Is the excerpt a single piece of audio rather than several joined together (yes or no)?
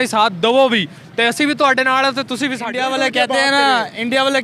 no